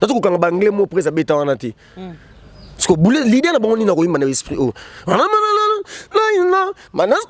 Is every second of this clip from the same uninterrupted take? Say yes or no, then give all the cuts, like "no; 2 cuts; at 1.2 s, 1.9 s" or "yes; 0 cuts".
yes; 0 cuts